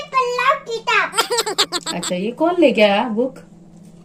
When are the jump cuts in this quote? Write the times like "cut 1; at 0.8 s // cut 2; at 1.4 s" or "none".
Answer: none